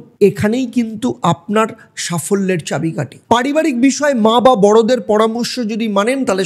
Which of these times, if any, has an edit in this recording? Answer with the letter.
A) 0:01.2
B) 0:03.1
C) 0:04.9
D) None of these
B